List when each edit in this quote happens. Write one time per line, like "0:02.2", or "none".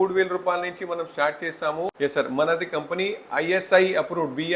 0:01.9